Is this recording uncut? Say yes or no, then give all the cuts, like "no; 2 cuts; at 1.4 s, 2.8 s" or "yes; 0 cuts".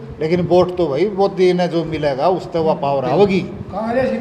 yes; 0 cuts